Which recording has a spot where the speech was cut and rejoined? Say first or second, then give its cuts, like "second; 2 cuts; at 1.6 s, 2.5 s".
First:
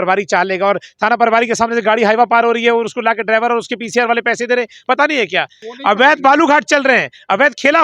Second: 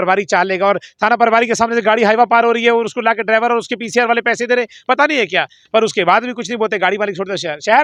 first; 1 cut; at 5.6 s